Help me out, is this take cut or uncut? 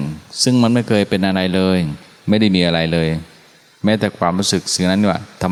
uncut